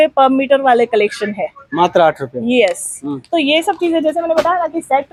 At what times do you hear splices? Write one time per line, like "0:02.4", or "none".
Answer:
none